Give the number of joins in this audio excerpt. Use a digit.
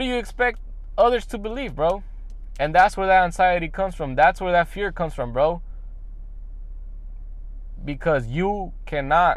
0